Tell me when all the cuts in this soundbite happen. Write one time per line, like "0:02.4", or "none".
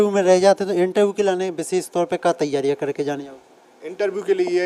none